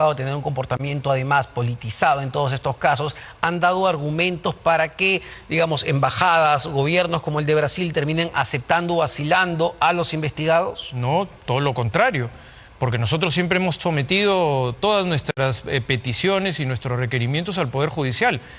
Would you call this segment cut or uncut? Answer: uncut